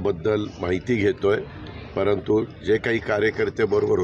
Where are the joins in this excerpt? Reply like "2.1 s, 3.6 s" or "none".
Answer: none